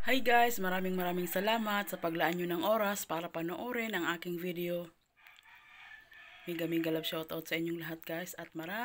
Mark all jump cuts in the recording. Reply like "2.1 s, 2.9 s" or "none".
none